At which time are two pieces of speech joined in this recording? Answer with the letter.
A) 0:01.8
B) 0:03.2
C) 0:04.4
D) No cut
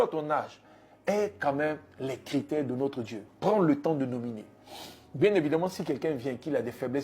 B